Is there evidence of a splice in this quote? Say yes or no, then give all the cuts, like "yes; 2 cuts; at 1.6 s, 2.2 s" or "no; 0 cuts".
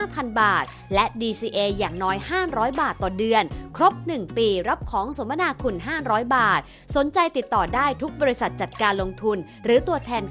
no; 0 cuts